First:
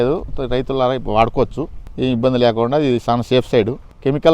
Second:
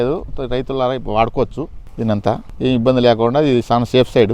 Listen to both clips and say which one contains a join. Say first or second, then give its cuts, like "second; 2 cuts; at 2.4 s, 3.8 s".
first; 1 cut; at 1.9 s